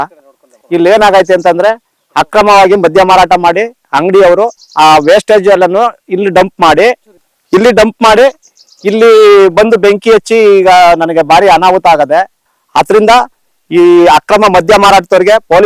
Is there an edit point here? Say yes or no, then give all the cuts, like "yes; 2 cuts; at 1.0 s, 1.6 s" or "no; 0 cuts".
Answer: yes; 1 cut; at 12.4 s